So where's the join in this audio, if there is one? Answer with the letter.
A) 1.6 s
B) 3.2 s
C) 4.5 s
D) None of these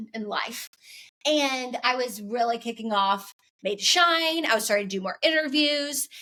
D